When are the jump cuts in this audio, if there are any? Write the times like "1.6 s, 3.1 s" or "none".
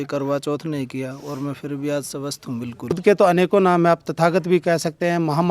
3.0 s